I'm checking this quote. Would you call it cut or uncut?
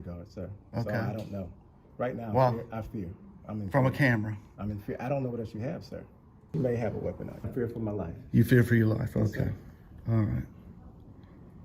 cut